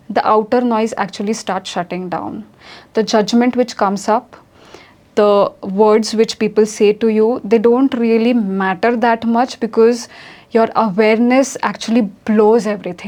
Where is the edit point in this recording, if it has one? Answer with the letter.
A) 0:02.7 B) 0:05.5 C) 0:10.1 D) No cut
D